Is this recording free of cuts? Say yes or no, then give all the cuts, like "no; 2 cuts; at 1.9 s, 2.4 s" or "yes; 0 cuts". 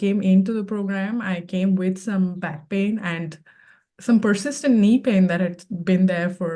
yes; 0 cuts